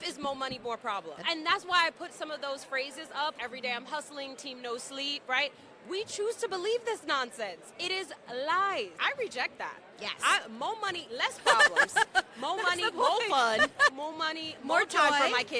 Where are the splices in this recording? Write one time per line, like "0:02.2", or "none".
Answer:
0:01.2
0:03.4
0:09.0
0:13.9